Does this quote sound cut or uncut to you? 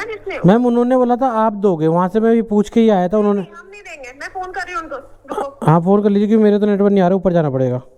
uncut